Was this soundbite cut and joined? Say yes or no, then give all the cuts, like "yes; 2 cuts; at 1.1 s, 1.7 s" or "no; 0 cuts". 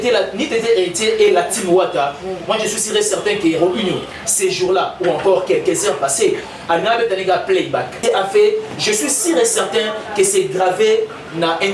yes; 1 cut; at 8.0 s